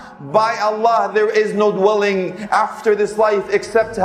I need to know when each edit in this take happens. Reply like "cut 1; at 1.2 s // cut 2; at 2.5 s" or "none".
none